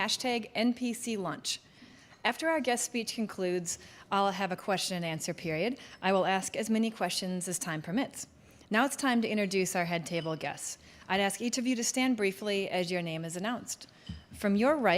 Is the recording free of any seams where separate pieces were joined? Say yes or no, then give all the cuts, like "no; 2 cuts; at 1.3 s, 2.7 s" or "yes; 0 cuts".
no; 1 cut; at 9.5 s